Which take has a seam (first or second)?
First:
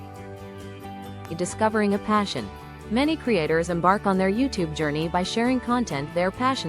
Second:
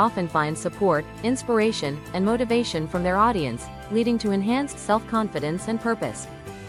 first